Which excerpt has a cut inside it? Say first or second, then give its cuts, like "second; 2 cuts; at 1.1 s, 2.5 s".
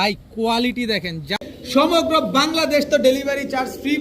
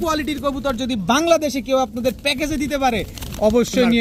first; 1 cut; at 1.5 s